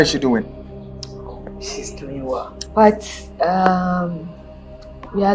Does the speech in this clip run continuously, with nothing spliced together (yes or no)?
no